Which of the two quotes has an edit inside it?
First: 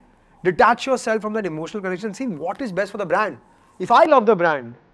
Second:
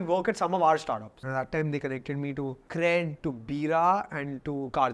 second; 2 cuts; at 1.1 s, 2.6 s

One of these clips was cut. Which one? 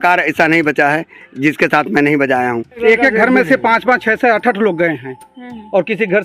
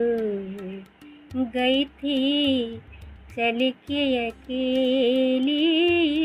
first; 1 cut; at 2.8 s

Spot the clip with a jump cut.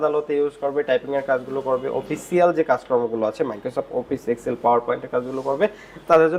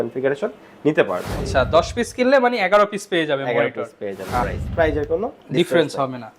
second; 2 cuts; at 1.4 s, 4.4 s

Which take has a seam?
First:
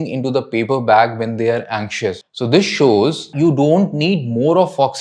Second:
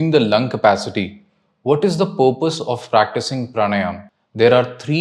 first; 2 cuts; at 2.2 s, 3.3 s

